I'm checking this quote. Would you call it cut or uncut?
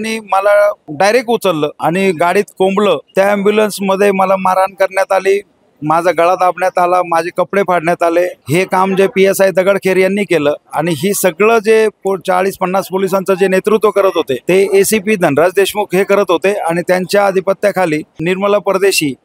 cut